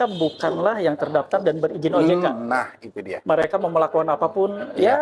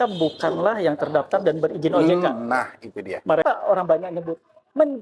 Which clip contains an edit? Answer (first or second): second